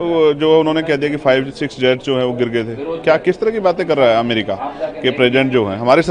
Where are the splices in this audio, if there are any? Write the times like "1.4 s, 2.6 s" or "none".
none